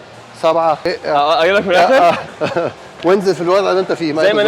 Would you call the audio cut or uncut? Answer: cut